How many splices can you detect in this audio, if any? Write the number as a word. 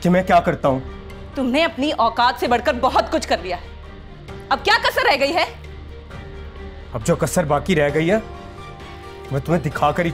zero